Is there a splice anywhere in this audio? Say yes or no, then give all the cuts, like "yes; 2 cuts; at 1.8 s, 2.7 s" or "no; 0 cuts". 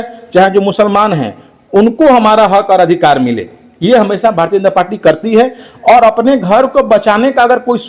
no; 0 cuts